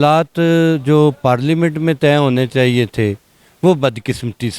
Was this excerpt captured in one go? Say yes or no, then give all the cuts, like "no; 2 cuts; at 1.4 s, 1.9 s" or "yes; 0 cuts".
yes; 0 cuts